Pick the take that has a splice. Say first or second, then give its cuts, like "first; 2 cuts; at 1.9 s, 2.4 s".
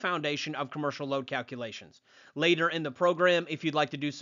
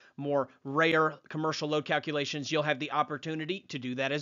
second; 1 cut; at 2.1 s